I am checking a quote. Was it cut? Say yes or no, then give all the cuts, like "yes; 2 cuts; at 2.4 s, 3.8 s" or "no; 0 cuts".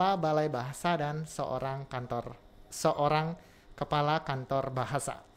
no; 0 cuts